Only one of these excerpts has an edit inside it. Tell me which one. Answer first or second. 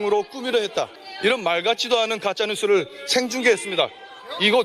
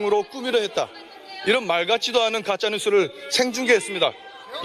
first